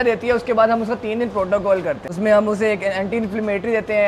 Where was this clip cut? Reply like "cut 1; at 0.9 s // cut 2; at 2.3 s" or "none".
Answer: cut 1; at 2.1 s